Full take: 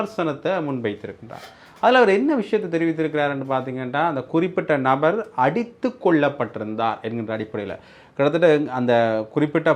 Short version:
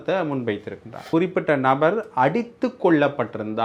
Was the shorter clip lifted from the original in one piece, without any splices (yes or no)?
no